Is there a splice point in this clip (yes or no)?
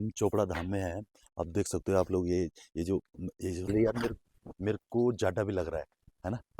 no